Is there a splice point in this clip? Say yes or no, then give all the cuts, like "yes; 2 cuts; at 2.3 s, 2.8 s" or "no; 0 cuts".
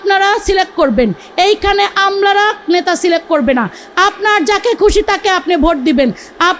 no; 0 cuts